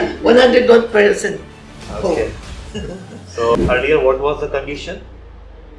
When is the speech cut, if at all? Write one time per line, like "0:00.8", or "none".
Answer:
0:03.5